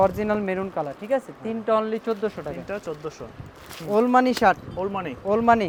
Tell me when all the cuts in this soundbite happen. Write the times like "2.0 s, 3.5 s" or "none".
none